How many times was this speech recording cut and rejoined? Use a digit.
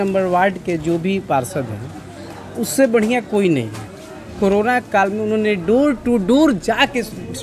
0